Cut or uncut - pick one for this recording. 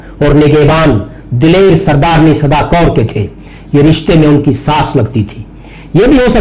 uncut